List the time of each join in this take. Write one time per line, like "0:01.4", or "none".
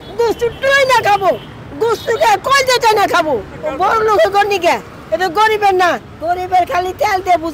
0:03.6
0:06.1